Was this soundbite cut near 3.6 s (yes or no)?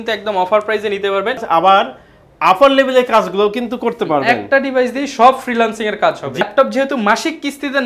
no